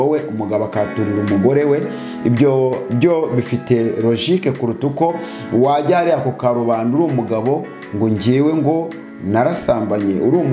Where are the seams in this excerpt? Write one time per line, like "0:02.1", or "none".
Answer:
none